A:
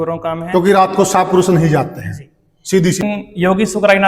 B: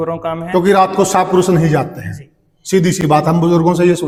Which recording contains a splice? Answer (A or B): A